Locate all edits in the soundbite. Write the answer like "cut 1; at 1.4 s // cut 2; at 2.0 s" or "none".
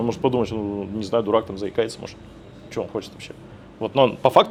none